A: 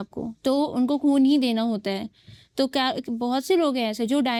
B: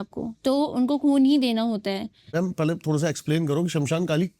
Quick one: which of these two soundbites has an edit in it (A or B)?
B